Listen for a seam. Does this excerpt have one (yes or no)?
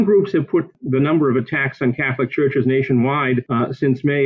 no